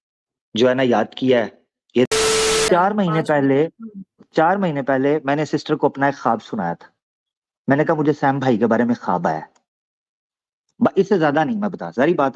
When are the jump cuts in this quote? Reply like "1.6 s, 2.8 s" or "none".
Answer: 2.1 s

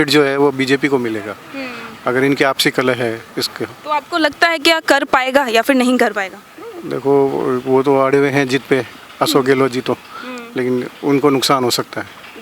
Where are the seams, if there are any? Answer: none

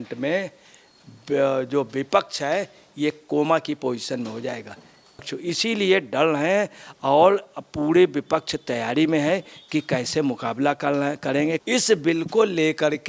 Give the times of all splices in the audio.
5.3 s, 11.6 s

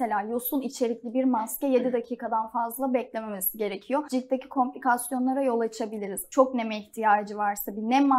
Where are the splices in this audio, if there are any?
4.1 s, 6.2 s

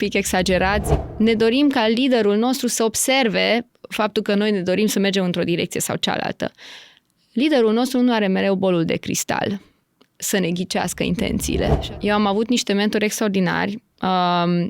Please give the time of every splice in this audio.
0.9 s, 11.8 s

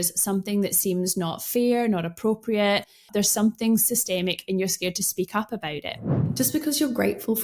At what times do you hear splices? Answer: 3.0 s, 6.2 s

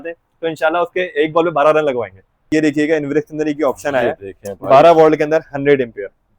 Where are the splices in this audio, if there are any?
2.4 s

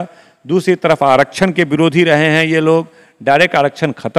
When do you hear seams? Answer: none

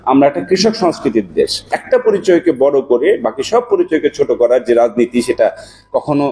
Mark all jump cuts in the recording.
1.7 s

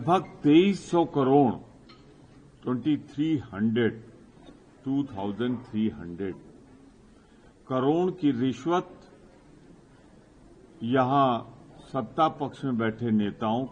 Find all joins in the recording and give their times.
none

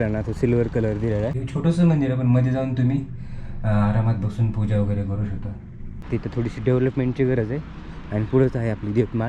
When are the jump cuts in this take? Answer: 1.4 s, 5.9 s

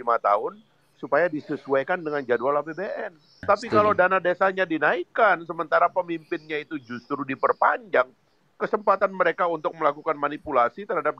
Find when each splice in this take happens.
3.4 s

